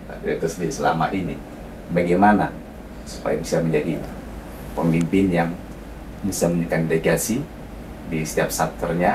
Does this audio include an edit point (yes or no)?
no